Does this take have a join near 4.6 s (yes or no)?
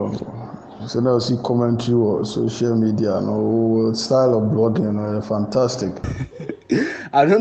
no